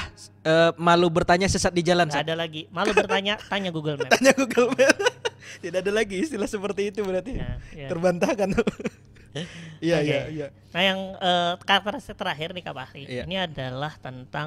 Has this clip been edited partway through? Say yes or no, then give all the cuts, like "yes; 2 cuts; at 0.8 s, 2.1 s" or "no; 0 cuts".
no; 0 cuts